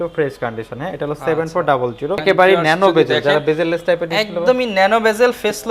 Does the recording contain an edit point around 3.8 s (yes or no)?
no